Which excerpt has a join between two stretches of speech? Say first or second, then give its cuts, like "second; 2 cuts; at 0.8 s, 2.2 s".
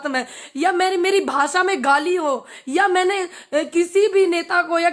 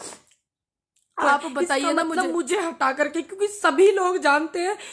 second; 1 cut; at 2.1 s